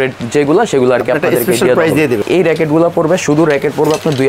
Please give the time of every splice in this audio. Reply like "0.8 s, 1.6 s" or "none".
2.2 s